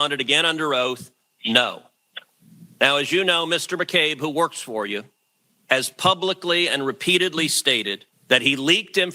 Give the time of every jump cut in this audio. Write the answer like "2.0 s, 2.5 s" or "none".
none